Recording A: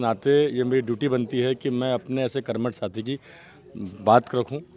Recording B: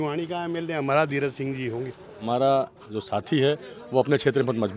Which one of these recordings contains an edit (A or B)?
B